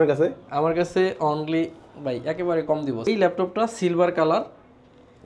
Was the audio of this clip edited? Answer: yes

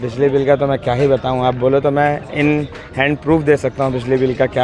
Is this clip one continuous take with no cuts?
yes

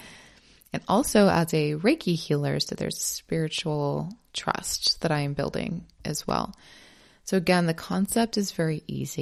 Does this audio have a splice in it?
no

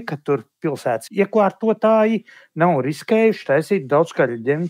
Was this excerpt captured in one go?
no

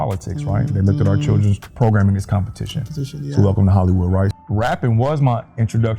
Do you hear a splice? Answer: yes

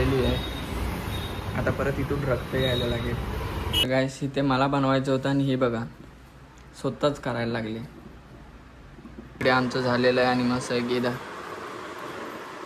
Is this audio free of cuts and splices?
no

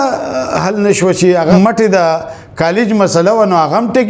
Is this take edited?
yes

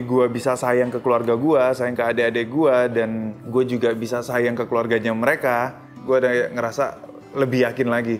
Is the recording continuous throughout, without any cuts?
yes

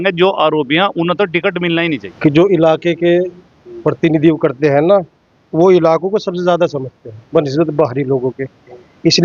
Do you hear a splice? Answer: yes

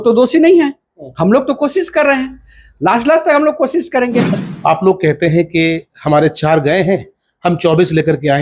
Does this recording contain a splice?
yes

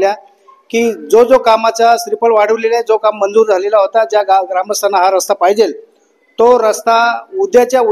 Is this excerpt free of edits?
yes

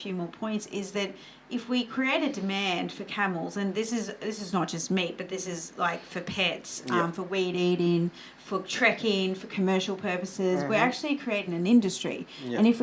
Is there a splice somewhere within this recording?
no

